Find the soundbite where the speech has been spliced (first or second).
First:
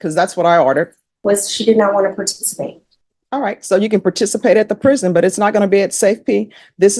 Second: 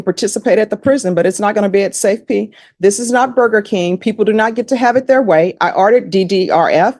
first